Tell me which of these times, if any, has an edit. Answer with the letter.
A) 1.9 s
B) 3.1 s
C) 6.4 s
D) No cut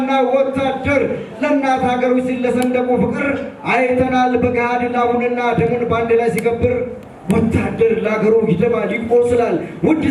D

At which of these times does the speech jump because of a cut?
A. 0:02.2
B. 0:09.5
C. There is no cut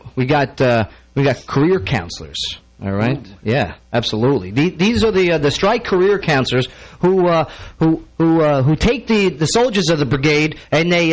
A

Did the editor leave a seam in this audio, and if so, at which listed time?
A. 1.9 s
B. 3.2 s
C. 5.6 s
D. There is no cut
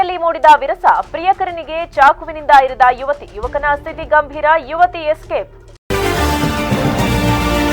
C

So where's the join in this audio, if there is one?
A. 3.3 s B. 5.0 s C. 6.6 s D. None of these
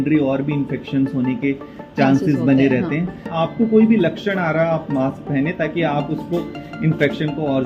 A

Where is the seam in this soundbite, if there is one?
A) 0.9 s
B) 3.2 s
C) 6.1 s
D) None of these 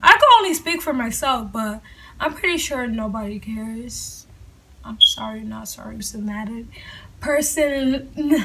C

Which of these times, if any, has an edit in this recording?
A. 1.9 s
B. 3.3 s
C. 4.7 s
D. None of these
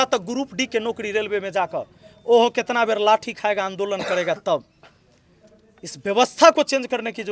D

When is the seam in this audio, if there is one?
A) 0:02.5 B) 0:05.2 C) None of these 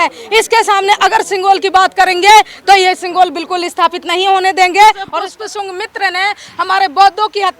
B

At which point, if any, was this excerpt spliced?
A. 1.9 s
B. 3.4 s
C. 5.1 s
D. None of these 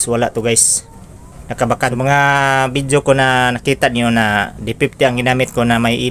A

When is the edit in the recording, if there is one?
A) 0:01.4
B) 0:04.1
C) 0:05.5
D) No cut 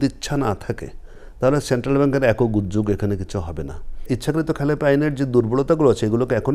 B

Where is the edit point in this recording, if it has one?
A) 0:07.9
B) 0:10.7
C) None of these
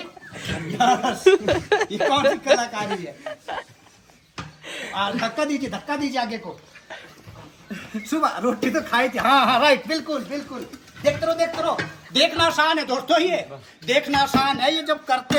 C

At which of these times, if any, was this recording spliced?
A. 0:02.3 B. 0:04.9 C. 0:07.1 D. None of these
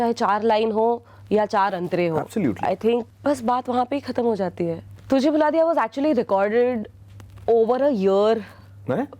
B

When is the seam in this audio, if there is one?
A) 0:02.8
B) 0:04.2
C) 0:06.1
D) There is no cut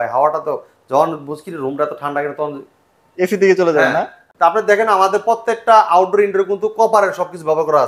B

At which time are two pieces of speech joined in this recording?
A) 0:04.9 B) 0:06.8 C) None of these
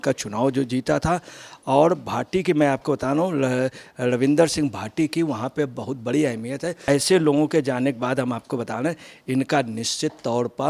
B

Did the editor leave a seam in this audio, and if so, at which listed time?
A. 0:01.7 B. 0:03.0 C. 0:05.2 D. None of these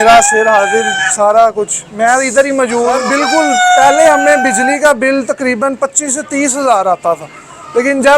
B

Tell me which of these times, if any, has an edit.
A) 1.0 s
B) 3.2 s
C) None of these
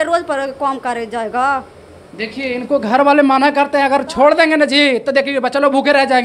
C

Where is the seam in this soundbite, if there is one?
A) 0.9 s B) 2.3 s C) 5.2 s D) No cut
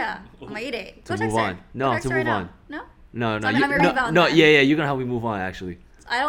A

